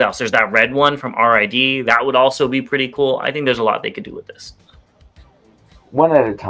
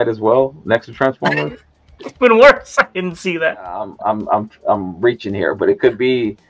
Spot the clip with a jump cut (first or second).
second